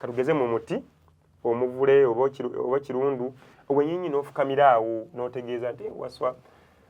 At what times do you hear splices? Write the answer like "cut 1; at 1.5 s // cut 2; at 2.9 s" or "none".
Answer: none